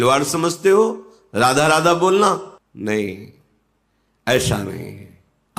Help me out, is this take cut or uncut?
uncut